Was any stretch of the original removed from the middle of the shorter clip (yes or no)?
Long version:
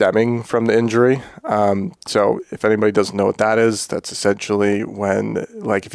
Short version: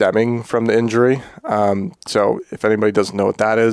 no